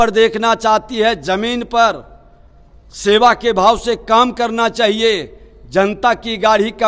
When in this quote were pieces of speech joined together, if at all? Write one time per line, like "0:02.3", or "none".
none